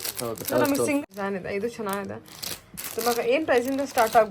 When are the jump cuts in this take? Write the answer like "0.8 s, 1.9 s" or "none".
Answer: 1.0 s